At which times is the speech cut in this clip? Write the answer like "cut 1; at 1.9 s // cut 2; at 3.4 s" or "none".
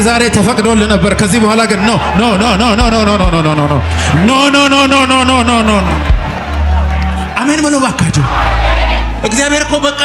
none

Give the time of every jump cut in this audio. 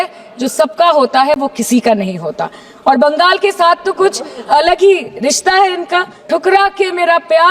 cut 1; at 6.2 s

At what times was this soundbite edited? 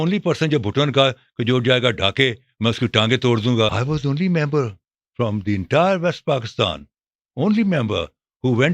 cut 1; at 3.8 s

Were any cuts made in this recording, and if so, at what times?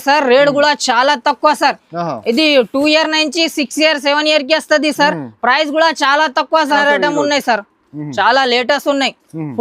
cut 1; at 6.8 s

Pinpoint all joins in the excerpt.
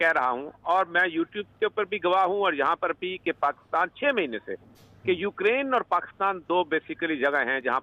none

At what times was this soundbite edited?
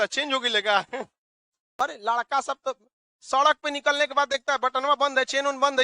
cut 1; at 1.9 s

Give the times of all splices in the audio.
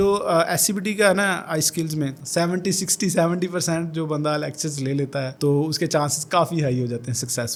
none

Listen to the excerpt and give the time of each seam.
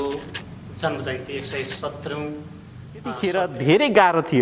cut 1; at 3.2 s

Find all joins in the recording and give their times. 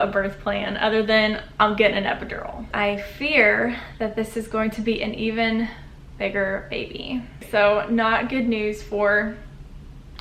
cut 1; at 2.7 s // cut 2; at 7.4 s

